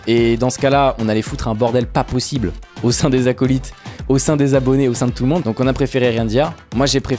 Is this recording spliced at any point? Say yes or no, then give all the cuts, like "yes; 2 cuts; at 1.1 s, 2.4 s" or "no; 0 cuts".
yes; 1 cut; at 5.4 s